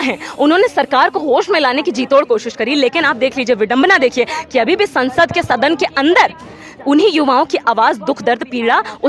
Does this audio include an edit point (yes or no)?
no